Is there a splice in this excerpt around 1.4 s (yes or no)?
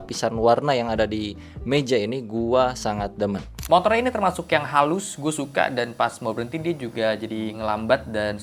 no